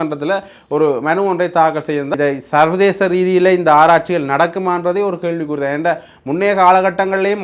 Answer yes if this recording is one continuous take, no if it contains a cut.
no